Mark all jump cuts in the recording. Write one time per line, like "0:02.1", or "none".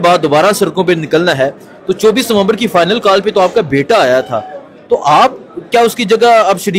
none